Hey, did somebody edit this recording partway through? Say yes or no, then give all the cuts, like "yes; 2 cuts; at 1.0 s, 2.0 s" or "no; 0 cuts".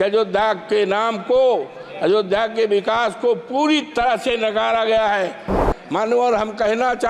yes; 1 cut; at 5.7 s